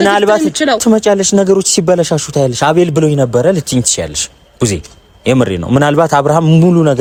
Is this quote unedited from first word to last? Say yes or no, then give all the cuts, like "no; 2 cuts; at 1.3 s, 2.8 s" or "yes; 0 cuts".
yes; 0 cuts